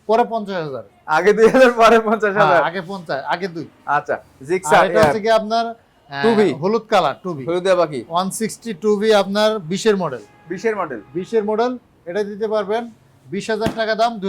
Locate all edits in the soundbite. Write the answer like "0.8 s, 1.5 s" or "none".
none

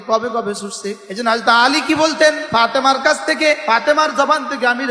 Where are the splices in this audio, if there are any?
1.0 s, 2.4 s, 3.6 s

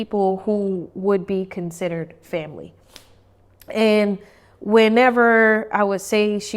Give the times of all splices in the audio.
none

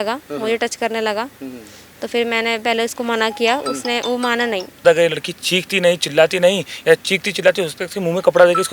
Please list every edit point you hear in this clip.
4.8 s

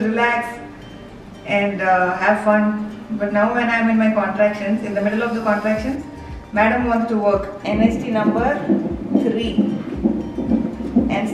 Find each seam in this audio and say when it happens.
7.6 s

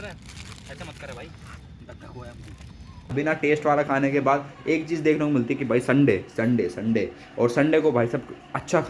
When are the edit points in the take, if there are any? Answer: 3.1 s

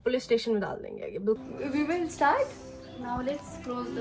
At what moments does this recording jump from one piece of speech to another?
1.4 s

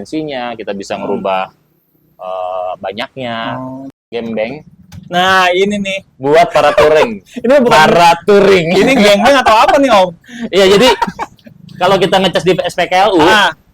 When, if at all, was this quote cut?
3.8 s

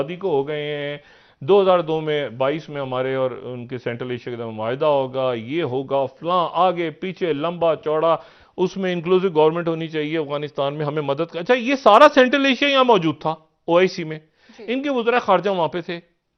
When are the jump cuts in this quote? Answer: none

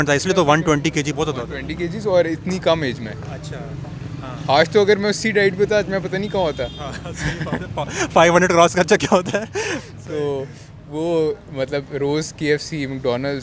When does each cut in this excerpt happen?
none

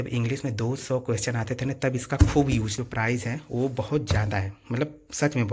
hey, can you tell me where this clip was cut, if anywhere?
2.8 s

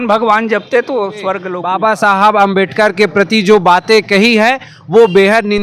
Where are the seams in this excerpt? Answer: 1.5 s

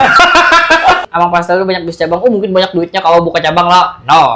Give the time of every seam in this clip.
1.0 s

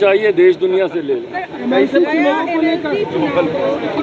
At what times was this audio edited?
none

